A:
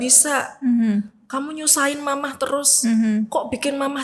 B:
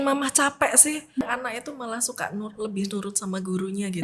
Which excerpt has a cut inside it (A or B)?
B